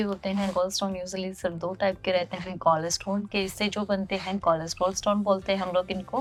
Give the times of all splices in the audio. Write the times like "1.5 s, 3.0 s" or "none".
none